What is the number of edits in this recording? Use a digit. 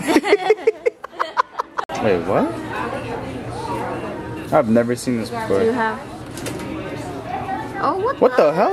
1